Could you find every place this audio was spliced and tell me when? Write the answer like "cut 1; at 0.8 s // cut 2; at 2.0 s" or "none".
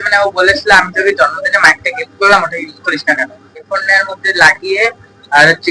none